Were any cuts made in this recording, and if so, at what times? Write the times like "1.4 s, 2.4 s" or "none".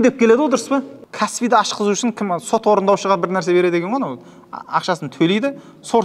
1.0 s